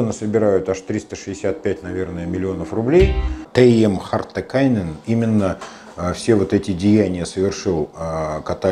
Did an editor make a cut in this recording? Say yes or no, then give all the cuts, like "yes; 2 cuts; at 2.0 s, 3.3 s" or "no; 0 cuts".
yes; 1 cut; at 3.4 s